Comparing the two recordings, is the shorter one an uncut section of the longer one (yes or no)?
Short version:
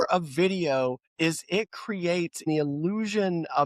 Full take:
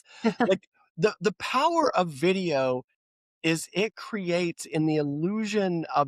no